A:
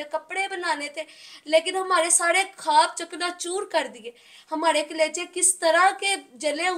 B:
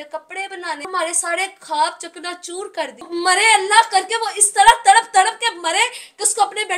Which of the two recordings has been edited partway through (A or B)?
B